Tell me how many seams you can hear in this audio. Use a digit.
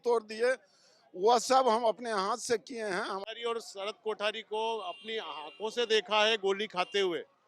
1